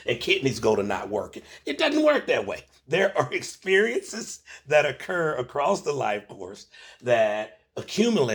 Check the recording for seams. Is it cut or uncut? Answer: uncut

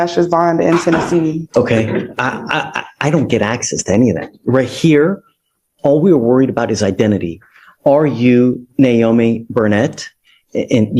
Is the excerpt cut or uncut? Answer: cut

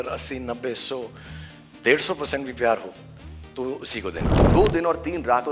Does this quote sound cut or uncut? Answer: cut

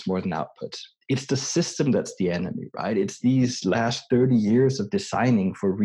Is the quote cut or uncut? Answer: uncut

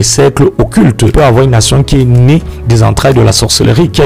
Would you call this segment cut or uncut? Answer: cut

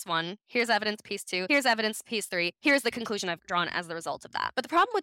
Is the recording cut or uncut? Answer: uncut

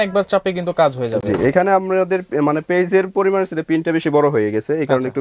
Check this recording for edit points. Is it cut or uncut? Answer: uncut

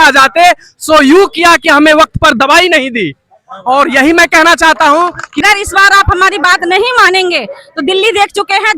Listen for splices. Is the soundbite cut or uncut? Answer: cut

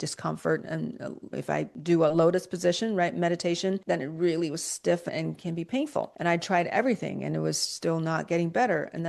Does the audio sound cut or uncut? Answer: cut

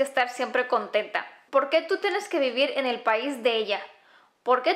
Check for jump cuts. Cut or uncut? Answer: cut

